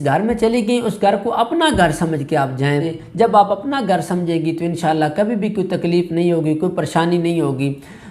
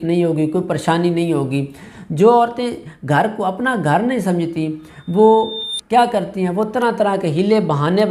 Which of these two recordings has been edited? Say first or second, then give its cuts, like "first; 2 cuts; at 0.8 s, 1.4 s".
first; 1 cut; at 3.0 s